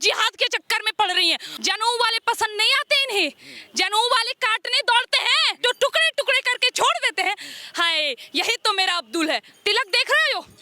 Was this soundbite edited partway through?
yes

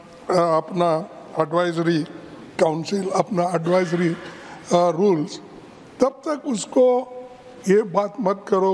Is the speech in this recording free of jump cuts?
yes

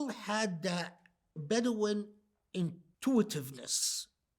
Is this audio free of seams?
no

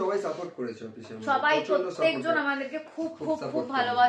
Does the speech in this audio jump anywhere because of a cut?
no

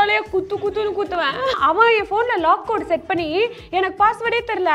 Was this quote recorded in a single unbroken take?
no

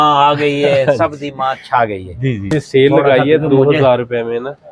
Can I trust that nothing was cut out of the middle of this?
no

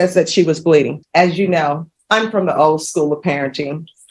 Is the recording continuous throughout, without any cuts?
no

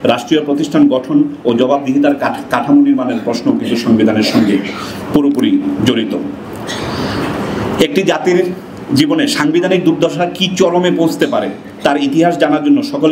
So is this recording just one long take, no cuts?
yes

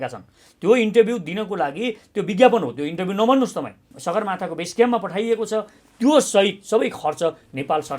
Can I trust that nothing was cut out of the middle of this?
no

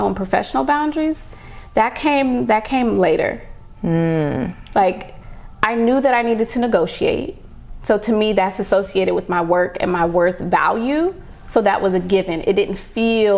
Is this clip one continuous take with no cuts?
yes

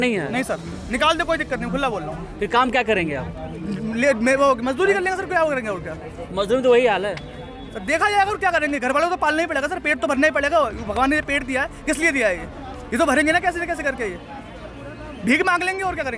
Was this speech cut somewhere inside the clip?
no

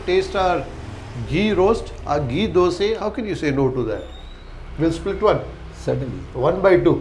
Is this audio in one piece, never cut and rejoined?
no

